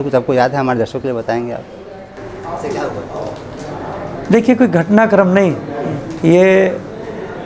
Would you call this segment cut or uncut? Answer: uncut